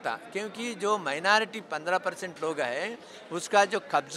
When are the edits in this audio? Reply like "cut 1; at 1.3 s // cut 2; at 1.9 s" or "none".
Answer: none